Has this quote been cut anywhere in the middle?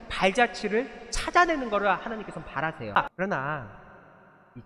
yes; 1 cut; at 3.0 s

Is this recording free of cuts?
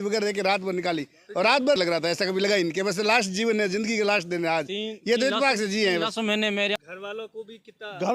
no; 2 cuts; at 1.8 s, 6.8 s

